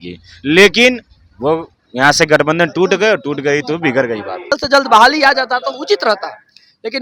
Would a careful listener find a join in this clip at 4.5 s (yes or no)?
yes